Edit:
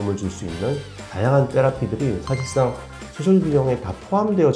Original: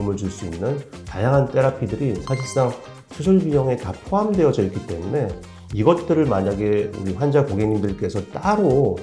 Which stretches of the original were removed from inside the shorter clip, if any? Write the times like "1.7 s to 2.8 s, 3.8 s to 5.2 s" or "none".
none